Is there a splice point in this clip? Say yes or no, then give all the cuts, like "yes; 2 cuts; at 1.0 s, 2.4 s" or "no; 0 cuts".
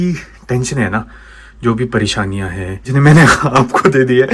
yes; 1 cut; at 2.9 s